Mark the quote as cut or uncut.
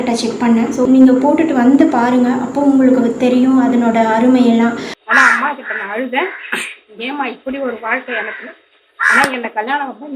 cut